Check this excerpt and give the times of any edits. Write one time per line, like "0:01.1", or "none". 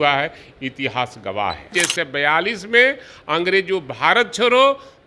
0:01.7